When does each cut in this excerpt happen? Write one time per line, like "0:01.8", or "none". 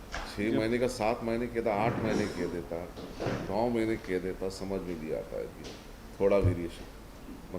none